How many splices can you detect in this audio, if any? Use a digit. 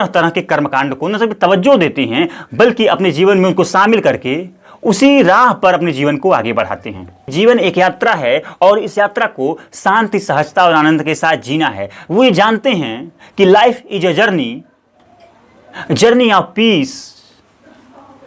1